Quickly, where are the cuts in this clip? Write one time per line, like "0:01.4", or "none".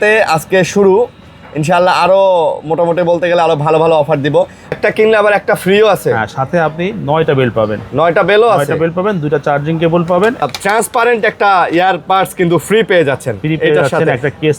0:04.7
0:10.4